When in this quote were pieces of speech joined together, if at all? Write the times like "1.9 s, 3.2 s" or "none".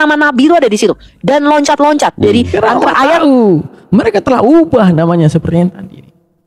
3.2 s